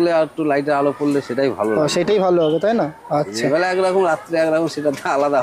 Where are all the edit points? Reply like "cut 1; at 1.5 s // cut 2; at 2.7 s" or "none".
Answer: none